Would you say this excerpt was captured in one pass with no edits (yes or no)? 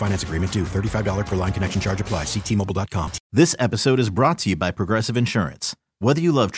no